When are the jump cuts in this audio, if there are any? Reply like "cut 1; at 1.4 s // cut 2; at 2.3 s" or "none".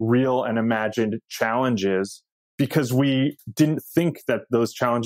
cut 1; at 2.4 s